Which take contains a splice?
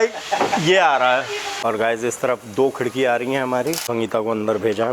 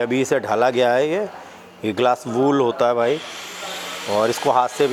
first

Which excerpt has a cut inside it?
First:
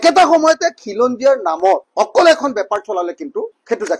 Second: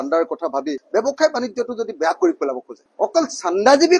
second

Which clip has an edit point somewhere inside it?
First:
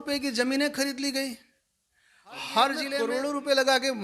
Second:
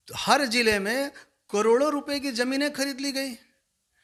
first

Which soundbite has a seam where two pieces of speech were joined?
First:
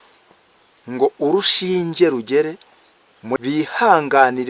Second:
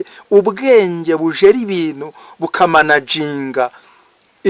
first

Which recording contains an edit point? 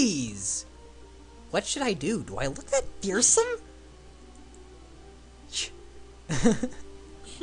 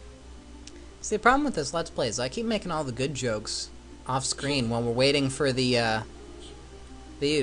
second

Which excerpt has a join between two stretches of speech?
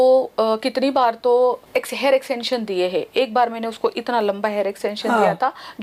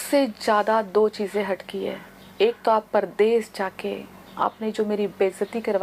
first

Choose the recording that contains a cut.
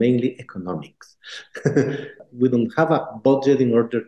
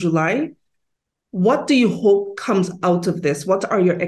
first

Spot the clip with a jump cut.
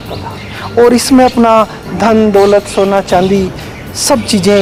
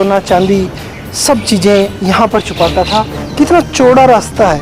second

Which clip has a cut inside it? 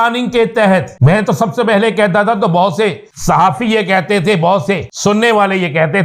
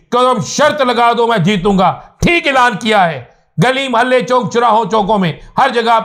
first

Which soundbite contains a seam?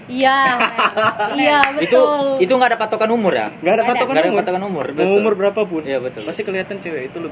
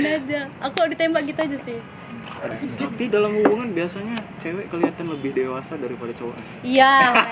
second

